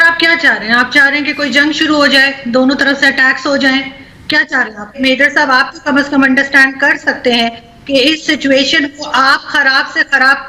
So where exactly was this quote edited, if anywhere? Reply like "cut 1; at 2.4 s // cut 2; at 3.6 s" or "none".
cut 1; at 5.0 s